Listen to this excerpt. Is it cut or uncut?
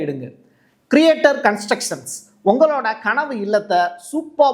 uncut